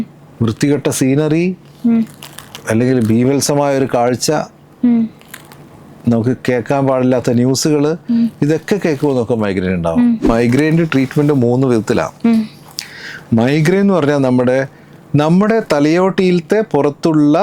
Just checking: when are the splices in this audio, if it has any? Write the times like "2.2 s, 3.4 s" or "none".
10.3 s